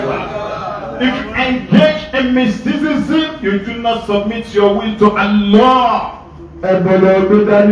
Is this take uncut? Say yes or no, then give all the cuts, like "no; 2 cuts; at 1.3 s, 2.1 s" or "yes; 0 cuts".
yes; 0 cuts